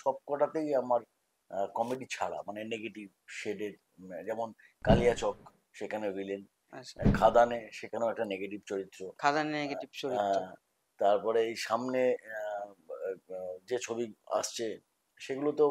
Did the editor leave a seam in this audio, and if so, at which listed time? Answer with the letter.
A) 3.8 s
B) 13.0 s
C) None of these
C